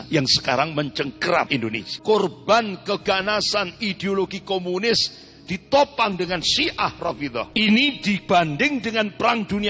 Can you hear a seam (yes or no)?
yes